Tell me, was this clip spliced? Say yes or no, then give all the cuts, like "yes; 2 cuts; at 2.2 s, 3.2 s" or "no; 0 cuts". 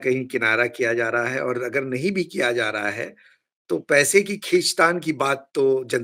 no; 0 cuts